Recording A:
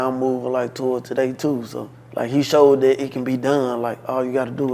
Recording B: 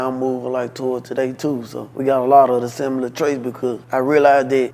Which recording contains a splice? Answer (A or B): B